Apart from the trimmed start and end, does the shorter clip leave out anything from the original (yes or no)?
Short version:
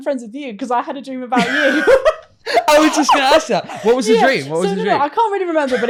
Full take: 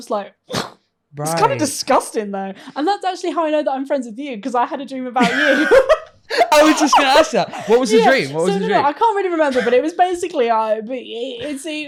no